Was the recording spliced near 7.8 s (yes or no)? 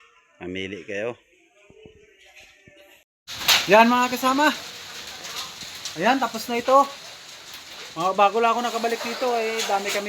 no